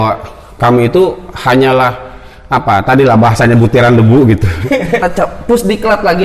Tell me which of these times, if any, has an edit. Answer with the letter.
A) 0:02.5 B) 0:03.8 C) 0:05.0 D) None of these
C